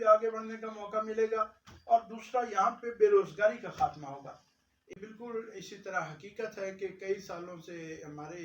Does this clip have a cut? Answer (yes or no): yes